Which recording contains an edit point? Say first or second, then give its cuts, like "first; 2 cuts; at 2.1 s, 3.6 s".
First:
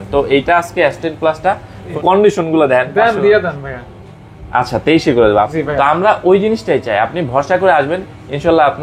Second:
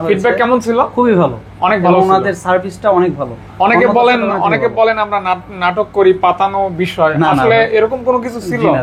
first; 2 cuts; at 2.0 s, 5.5 s